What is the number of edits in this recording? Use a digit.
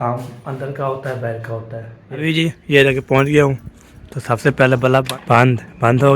2